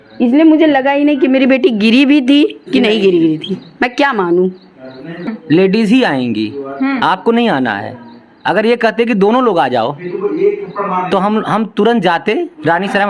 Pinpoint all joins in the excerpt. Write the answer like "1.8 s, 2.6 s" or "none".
5.3 s